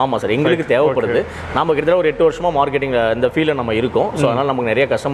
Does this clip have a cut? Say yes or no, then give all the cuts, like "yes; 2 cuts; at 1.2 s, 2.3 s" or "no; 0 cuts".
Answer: no; 0 cuts